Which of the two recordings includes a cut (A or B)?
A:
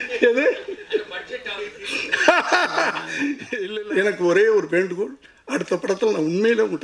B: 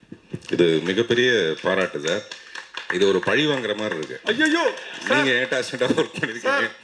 A